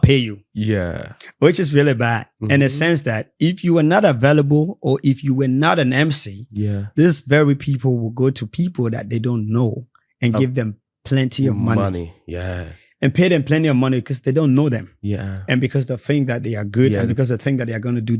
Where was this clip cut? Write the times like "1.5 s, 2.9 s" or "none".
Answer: none